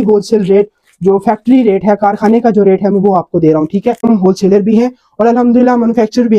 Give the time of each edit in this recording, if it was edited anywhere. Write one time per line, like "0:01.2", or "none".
0:04.0